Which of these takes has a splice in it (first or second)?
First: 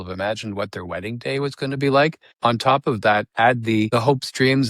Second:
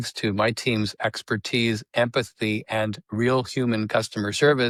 first